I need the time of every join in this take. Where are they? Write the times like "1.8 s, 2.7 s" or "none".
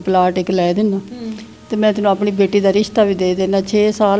none